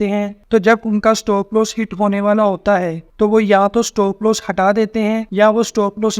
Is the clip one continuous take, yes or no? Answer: no